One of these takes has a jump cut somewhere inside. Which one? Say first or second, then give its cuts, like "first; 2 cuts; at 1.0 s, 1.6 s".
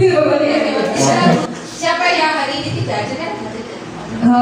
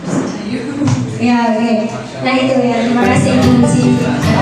first; 1 cut; at 1.0 s